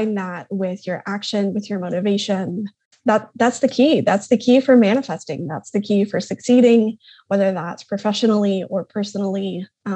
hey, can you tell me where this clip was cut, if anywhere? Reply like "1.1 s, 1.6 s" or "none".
none